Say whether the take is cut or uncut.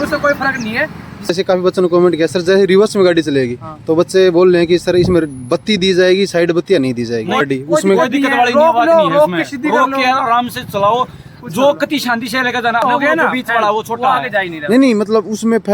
cut